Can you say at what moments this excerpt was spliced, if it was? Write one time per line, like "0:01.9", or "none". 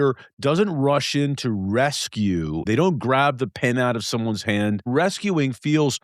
0:02.6
0:04.8